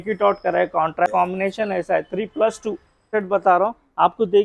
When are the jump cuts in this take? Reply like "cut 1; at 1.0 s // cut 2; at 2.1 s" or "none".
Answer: cut 1; at 1.1 s // cut 2; at 3.1 s